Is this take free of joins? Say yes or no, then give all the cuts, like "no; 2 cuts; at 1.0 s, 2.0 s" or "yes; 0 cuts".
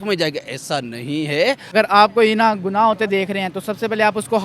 no; 1 cut; at 1.6 s